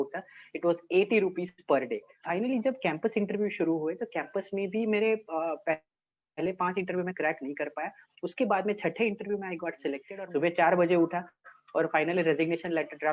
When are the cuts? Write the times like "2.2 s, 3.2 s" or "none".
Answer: 2.1 s, 10.1 s

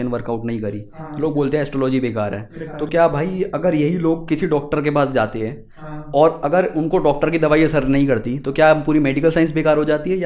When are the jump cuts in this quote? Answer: none

